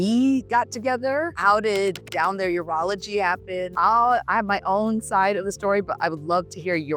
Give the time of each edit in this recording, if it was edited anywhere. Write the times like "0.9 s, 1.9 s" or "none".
none